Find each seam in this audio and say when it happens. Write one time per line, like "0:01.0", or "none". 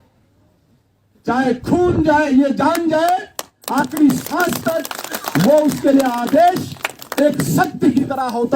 none